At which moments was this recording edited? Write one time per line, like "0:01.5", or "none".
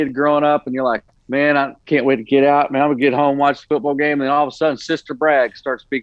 0:01.1
0:01.8